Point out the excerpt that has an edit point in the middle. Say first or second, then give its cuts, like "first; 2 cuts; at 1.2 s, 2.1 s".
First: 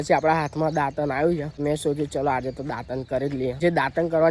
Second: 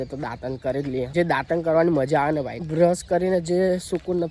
first; 1 cut; at 1.5 s